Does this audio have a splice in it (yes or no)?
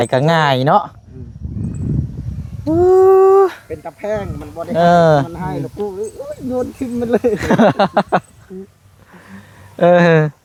no